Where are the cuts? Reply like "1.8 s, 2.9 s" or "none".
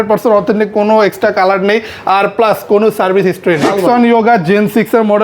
3.7 s